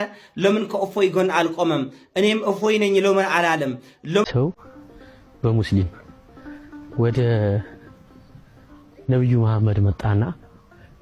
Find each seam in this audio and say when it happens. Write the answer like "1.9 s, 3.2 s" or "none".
4.2 s